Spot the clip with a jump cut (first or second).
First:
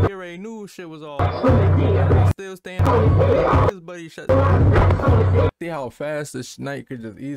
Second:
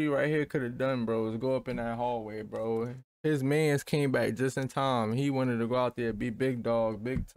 first